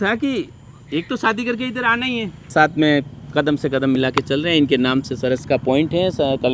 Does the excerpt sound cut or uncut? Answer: cut